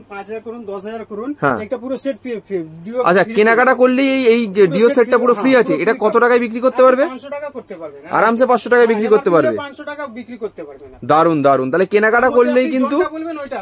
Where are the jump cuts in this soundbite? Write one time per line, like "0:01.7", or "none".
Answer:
none